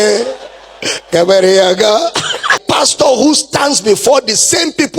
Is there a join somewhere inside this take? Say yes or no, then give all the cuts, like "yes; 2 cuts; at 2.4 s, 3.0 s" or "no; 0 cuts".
yes; 1 cut; at 2.6 s